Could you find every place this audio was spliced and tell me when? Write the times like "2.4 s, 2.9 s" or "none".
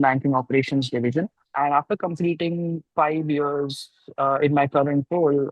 1.4 s